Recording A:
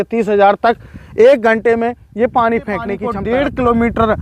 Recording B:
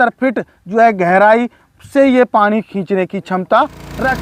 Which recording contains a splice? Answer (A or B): A